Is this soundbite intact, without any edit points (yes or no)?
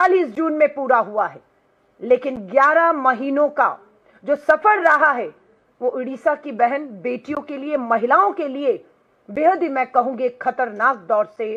yes